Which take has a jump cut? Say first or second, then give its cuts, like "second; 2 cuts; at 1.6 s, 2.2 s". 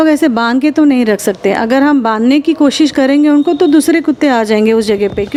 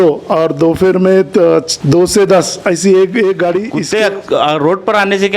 second; 2 cuts; at 1.7 s, 3.8 s